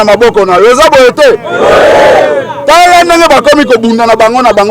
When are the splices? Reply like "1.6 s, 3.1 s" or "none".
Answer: none